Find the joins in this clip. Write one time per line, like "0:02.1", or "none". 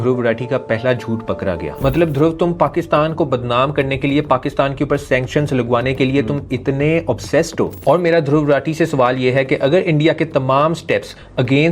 0:01.5
0:07.8